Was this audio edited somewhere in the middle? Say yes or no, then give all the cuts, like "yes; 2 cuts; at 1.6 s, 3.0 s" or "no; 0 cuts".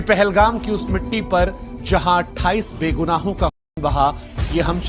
no; 0 cuts